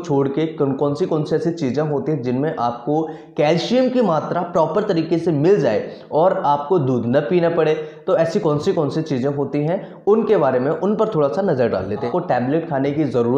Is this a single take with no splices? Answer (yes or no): no